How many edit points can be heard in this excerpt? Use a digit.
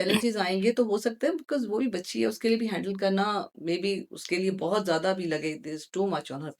0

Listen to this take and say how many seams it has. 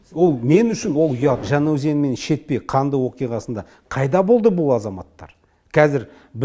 1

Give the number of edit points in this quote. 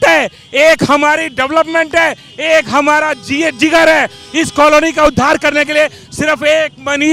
0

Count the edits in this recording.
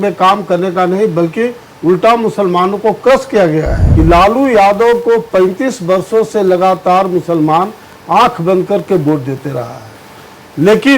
1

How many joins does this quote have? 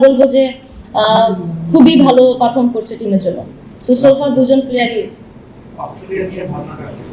0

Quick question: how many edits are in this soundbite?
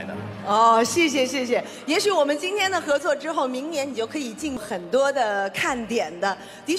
1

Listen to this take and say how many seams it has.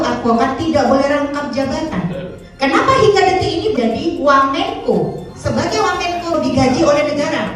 3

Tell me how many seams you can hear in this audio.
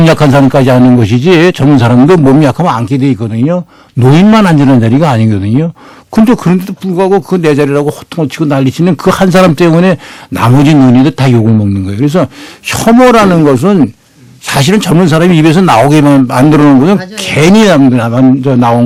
0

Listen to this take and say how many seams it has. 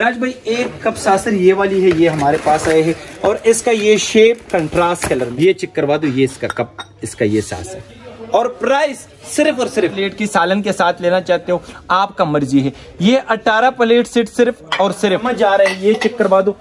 3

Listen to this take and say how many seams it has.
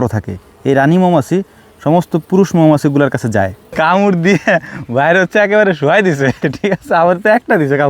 1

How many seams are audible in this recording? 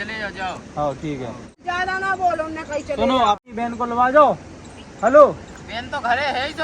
2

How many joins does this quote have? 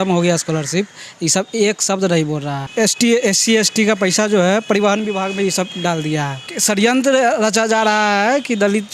2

